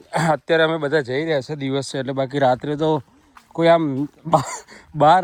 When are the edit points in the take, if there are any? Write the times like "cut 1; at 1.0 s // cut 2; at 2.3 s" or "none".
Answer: none